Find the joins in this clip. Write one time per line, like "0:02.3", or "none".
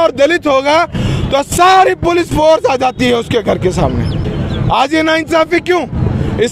none

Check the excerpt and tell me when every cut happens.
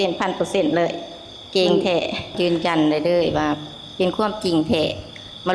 0:02.4

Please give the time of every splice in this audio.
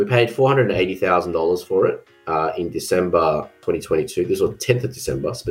0:03.6

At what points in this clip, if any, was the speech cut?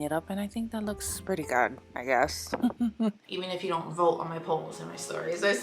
0:03.3

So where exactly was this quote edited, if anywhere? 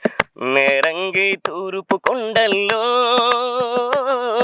none

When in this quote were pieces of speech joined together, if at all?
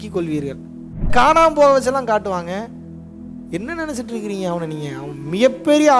0:01.1

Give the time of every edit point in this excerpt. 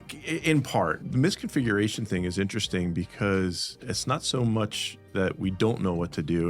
0:01.0

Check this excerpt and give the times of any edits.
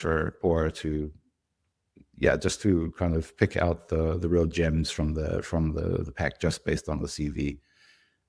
none

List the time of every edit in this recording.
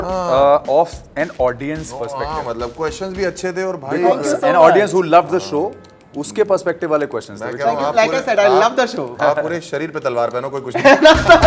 none

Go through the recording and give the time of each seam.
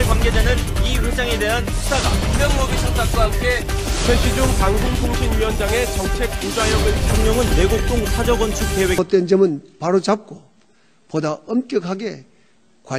0:09.0

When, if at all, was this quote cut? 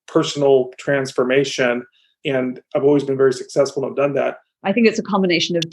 0:04.5

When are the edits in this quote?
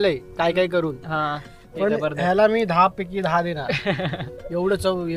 none

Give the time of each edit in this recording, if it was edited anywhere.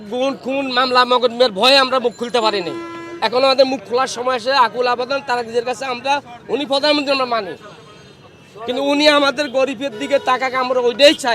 none

